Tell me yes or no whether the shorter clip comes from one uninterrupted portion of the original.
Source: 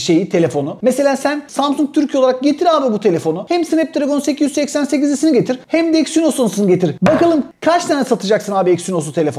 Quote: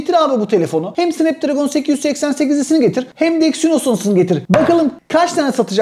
yes